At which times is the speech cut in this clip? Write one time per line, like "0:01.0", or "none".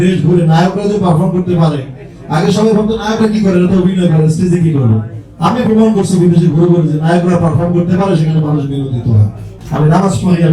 0:09.6